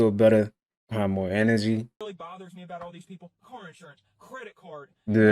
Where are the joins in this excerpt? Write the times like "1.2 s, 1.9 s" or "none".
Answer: 2.0 s

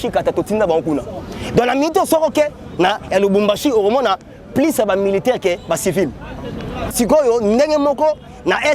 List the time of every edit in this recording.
6.9 s

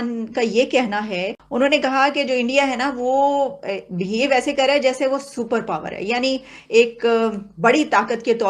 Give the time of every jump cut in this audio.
1.4 s

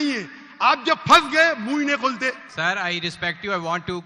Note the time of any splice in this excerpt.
2.5 s

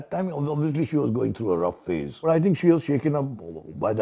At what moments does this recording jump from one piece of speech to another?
2.1 s

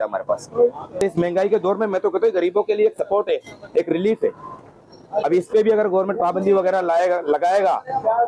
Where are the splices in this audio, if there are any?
1.0 s

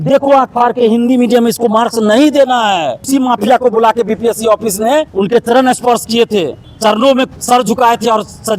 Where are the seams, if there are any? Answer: 3.0 s

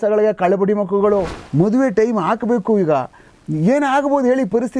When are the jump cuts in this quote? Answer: 1.4 s

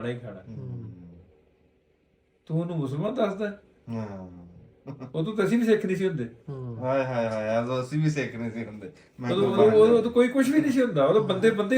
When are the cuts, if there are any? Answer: none

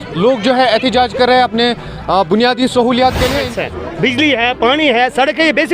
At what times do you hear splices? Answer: 3.5 s

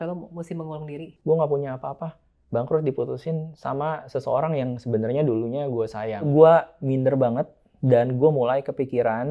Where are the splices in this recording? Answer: 1.1 s, 6.3 s

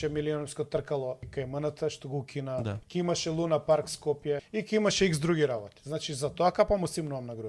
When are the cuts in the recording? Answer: 1.3 s, 2.8 s, 4.5 s

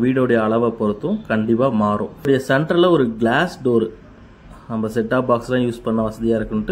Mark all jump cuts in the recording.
2.3 s

